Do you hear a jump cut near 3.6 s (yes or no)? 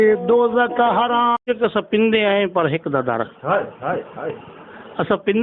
no